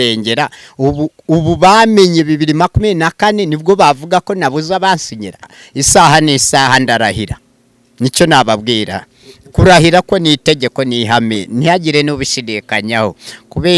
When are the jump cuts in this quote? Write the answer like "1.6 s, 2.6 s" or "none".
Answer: 5.5 s